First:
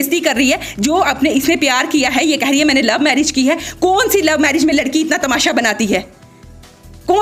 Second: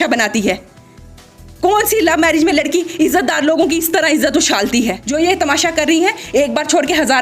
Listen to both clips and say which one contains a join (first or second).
second